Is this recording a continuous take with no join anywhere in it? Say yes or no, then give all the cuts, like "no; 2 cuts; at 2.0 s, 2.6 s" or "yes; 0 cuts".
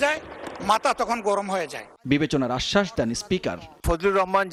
yes; 0 cuts